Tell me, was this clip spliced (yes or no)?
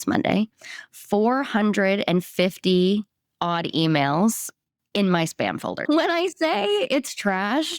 yes